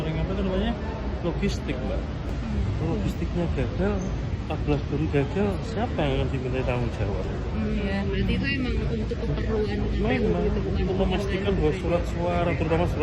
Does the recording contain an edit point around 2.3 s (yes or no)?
yes